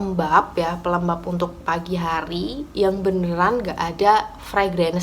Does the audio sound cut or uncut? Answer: uncut